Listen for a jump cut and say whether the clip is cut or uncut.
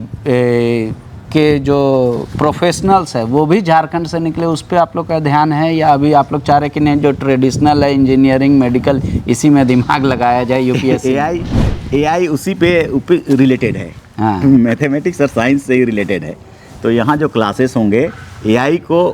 uncut